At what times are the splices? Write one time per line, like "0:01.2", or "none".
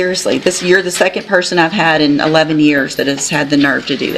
none